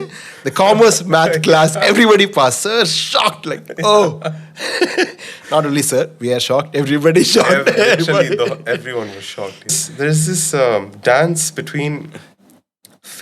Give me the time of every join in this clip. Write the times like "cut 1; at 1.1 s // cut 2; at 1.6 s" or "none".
cut 1; at 9.8 s

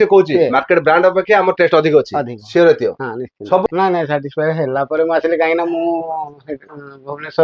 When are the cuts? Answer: cut 1; at 3.6 s

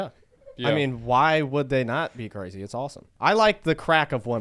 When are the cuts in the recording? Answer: cut 1; at 3.0 s

